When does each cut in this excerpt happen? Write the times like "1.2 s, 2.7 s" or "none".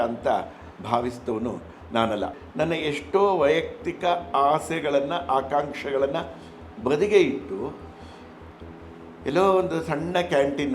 2.3 s